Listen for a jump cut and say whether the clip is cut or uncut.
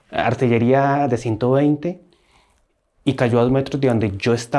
uncut